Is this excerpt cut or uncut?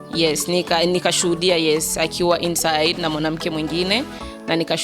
uncut